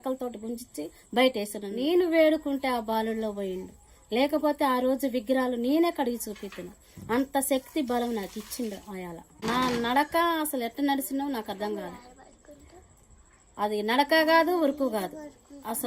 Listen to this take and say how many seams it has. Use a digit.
2